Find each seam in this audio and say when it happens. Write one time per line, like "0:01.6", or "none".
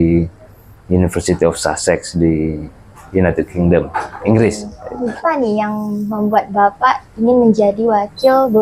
0:05.2